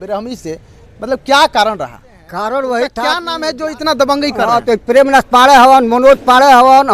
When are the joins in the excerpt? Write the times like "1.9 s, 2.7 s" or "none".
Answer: 3.2 s